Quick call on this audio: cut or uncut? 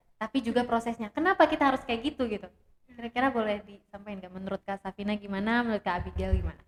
uncut